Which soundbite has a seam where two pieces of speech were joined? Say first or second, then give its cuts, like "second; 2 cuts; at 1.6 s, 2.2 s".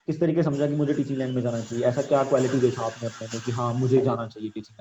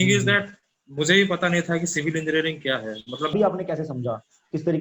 second; 1 cut; at 3.3 s